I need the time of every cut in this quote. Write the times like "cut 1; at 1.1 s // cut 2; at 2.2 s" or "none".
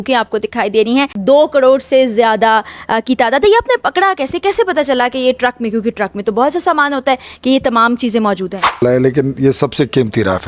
cut 1; at 1.2 s // cut 2; at 8.8 s